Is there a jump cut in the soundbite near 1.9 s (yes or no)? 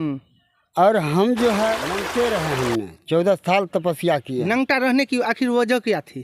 yes